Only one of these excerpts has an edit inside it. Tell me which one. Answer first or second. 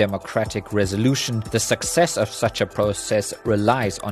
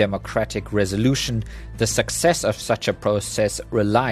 first